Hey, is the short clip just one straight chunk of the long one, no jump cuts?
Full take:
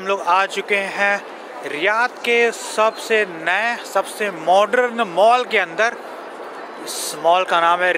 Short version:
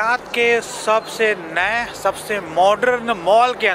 yes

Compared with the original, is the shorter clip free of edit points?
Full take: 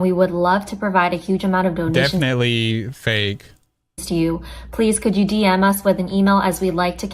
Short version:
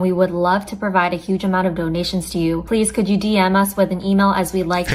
no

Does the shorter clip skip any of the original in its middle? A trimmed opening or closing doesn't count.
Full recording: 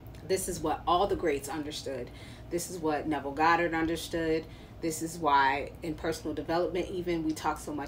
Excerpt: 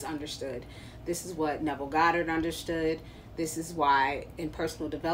no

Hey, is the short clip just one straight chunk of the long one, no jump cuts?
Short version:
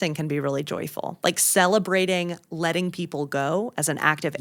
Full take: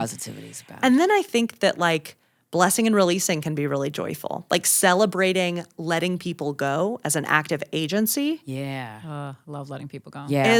yes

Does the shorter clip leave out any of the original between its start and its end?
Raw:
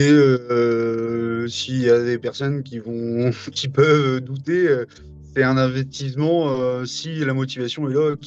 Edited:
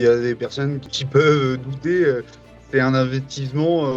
yes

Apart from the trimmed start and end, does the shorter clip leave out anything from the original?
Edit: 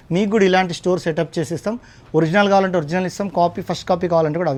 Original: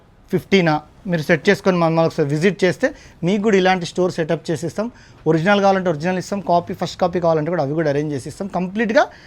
no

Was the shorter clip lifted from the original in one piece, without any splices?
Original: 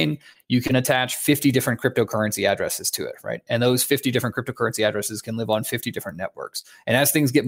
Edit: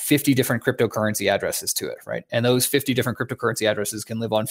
yes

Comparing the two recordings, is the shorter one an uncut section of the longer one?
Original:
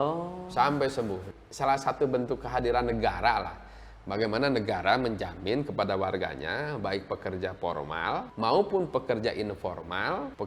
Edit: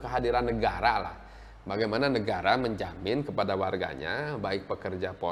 yes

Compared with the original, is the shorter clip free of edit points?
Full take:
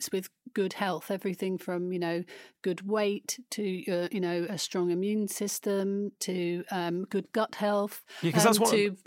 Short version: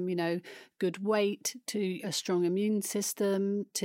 no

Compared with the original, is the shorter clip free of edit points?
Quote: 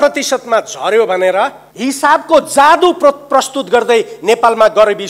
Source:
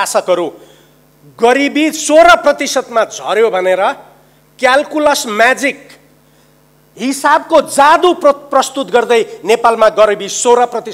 no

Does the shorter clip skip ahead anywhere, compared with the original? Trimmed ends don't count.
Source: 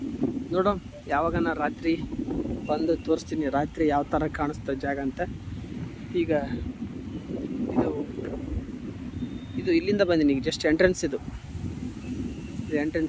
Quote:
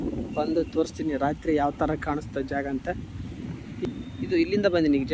yes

